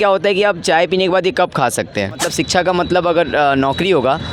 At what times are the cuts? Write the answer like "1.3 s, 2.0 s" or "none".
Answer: 2.3 s